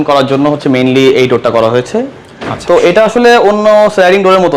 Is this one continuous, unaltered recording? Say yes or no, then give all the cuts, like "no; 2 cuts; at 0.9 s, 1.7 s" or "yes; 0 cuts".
yes; 0 cuts